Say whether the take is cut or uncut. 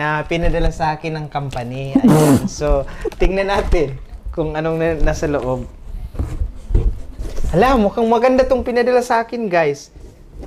uncut